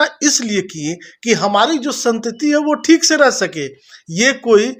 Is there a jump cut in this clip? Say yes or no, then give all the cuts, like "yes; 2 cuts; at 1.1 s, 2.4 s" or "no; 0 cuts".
no; 0 cuts